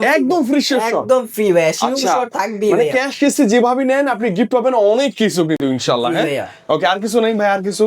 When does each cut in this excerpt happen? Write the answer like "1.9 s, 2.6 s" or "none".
none